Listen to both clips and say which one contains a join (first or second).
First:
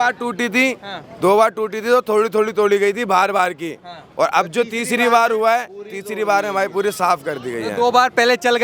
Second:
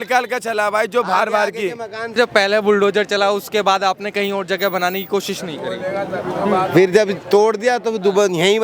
second